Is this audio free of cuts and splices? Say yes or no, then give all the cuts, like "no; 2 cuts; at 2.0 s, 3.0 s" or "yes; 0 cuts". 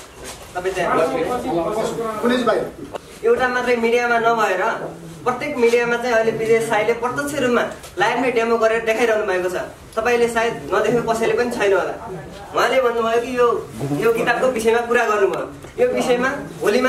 no; 1 cut; at 2.8 s